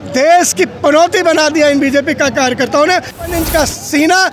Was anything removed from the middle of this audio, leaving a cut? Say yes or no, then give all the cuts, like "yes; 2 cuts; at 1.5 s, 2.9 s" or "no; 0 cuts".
yes; 1 cut; at 3.3 s